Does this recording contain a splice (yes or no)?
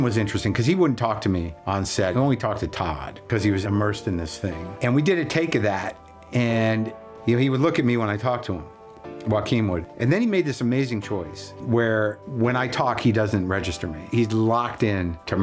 yes